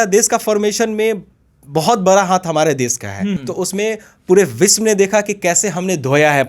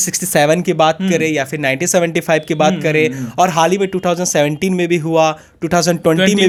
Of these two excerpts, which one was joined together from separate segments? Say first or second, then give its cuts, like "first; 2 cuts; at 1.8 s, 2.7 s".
first; 1 cut; at 3.4 s